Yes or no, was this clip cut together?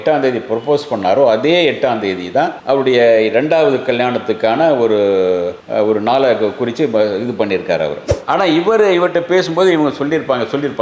yes